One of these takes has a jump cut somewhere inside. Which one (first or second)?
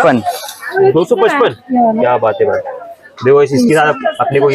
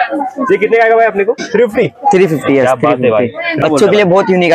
second